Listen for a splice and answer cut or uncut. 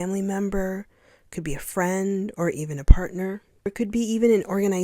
cut